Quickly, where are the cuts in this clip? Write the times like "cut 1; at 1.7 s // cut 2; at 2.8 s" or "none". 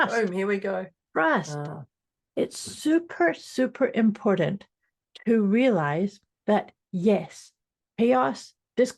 cut 1; at 6.3 s